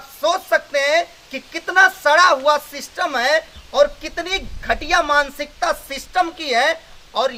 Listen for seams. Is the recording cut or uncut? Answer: uncut